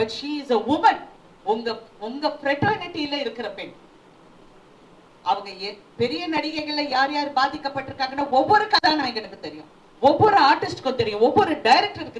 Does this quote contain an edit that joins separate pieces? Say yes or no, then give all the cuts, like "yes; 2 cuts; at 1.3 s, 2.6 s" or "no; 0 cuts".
no; 0 cuts